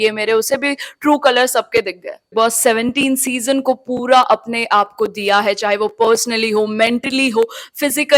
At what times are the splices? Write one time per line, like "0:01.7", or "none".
0:02.3

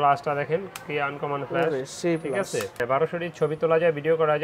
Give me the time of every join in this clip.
0:02.8

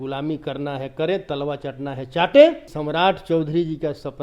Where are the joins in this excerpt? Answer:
0:02.7

